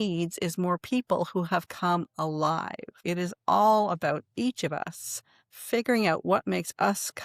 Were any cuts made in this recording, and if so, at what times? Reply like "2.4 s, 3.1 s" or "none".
2.9 s